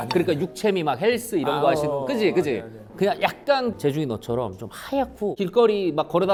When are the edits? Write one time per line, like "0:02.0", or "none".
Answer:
none